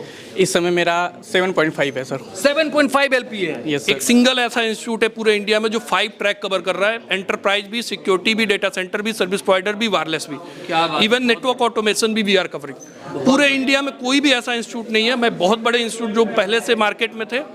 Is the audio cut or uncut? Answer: cut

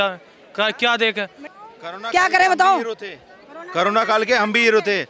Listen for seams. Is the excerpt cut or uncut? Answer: cut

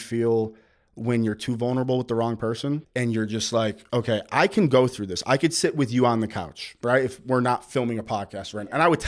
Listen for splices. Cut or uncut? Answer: cut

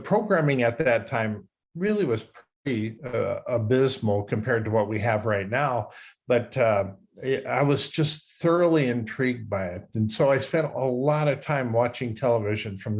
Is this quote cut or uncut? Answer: uncut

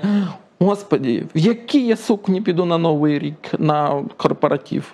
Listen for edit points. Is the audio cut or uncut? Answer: uncut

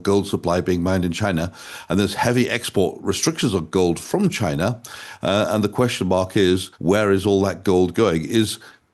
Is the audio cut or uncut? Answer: uncut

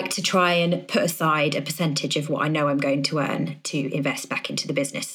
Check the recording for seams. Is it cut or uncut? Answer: uncut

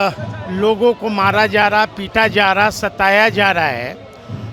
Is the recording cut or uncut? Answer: uncut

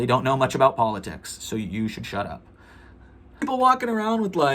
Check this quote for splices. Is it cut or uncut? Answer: cut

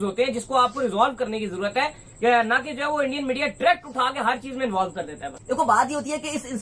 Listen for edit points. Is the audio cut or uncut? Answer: cut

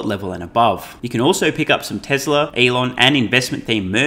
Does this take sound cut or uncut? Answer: cut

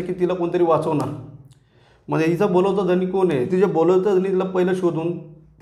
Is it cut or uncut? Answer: cut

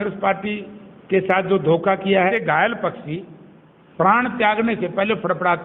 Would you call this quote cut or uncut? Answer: cut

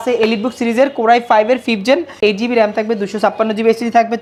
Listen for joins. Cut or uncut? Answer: uncut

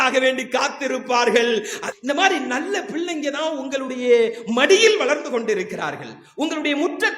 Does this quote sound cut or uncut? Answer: cut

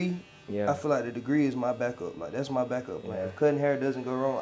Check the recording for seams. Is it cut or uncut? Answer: uncut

